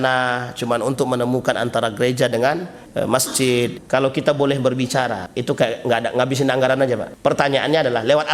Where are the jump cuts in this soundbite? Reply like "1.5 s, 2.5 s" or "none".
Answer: 2.8 s, 3.8 s, 5.3 s, 7.1 s